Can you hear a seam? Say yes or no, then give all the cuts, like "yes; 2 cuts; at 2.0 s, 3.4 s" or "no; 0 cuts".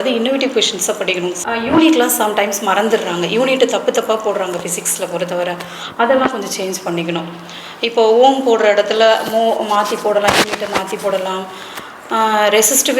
no; 0 cuts